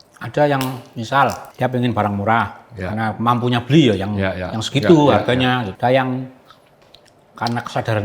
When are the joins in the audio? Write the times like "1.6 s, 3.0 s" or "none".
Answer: 1.5 s, 5.7 s